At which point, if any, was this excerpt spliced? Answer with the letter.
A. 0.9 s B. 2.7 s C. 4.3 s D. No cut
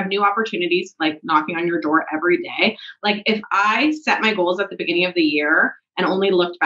D